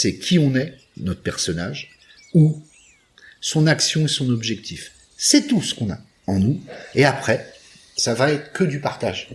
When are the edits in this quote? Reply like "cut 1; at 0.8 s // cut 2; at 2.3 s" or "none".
cut 1; at 7.9 s